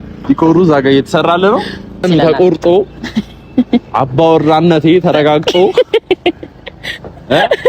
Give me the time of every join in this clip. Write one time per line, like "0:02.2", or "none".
0:02.0